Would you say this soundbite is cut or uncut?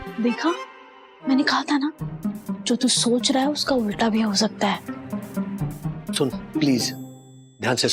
uncut